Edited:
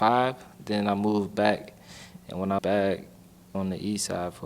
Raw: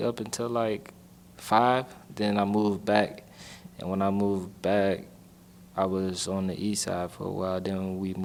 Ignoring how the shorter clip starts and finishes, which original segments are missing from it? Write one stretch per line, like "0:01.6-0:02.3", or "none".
0:04.1-0:04.6
0:05.5-0:06.3

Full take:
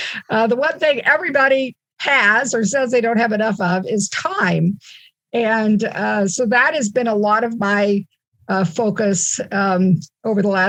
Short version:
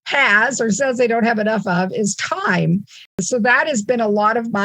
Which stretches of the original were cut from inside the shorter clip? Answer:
0:05.2-0:06.3

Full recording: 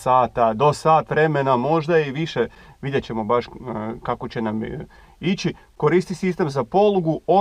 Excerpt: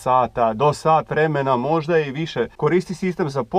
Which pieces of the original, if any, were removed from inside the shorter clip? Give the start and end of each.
0:02.5-0:05.7

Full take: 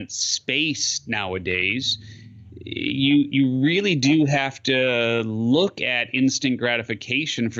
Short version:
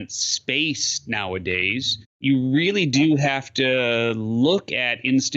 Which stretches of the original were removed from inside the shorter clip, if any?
0:02.2-0:03.3

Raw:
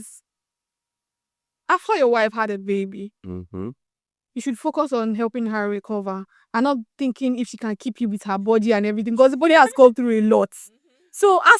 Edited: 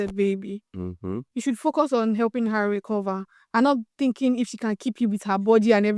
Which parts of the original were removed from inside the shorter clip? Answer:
0:03.7-0:04.2

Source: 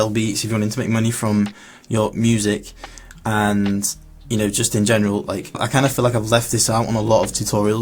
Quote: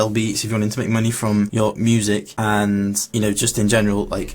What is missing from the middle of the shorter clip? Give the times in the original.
0:01.5-0:01.9
0:02.7-0:03.2
0:03.9-0:04.2

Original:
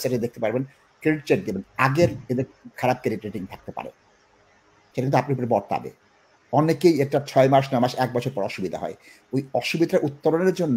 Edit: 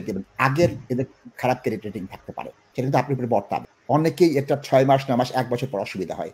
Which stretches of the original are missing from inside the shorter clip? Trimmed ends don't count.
0:03.9-0:04.7
0:05.9-0:06.4

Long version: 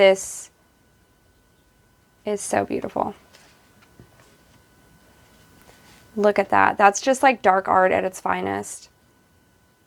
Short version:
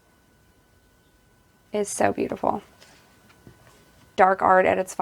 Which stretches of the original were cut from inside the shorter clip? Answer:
0:04.6-0:07.4

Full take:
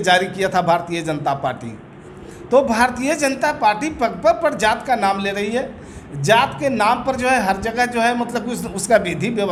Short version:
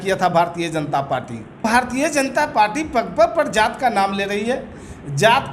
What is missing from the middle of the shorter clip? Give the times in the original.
0:01.9-0:02.7

